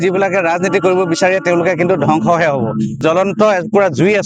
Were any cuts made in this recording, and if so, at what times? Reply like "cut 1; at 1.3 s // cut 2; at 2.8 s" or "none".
cut 1; at 3.0 s